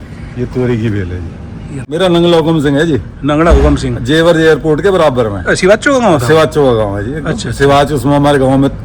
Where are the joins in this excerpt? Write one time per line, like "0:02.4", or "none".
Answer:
0:01.8